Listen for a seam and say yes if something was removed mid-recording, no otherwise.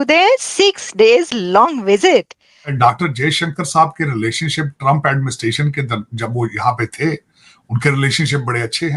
yes